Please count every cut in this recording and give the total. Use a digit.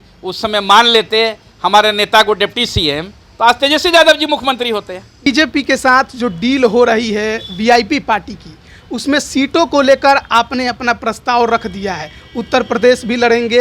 1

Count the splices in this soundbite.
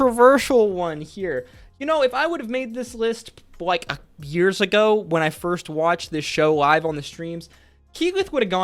0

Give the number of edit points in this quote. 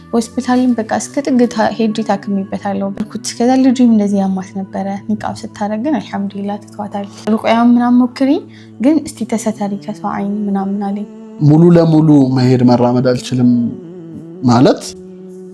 3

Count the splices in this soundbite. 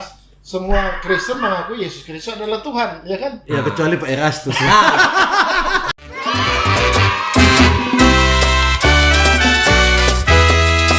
1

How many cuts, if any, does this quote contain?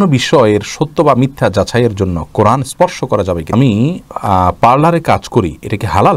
1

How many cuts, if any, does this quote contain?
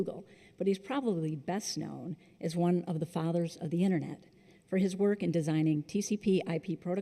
0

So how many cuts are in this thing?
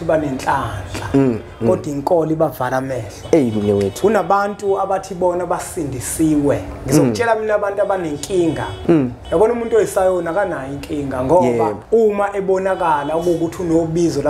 2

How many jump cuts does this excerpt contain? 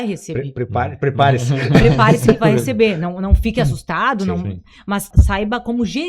1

